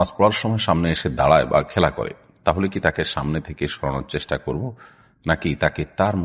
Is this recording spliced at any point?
no; 0 cuts

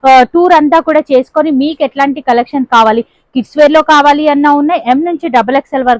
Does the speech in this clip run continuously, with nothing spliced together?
yes; 0 cuts

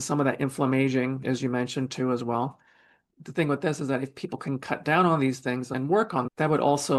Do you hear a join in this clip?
no; 0 cuts

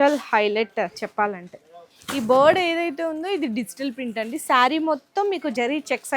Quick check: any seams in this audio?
yes; 1 cut; at 2.0 s

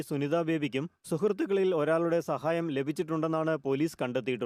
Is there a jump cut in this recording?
no; 0 cuts

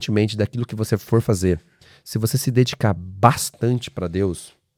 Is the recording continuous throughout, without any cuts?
yes; 0 cuts

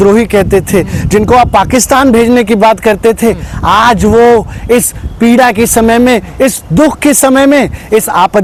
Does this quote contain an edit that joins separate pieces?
no; 0 cuts

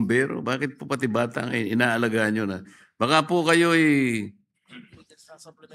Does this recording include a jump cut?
no; 0 cuts

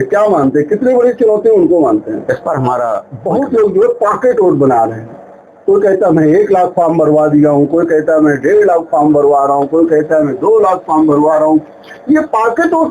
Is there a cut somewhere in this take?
yes; 1 cut; at 3.1 s

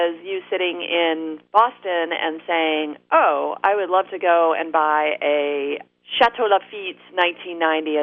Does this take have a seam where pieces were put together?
yes; 1 cut; at 1.4 s

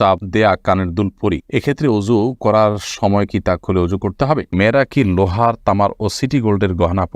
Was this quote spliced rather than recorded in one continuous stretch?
yes; 1 cut; at 4.5 s

